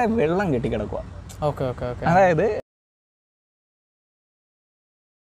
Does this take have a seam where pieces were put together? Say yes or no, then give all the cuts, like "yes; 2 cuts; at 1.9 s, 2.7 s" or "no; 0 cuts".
no; 0 cuts